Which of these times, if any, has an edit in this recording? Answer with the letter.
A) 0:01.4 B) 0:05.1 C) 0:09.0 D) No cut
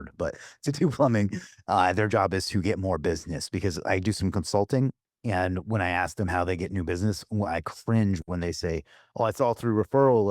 B